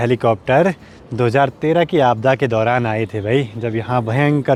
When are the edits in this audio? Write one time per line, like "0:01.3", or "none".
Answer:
none